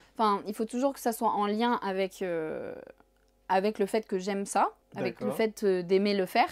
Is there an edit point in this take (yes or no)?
yes